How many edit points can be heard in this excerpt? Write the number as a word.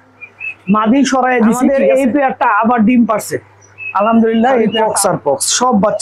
two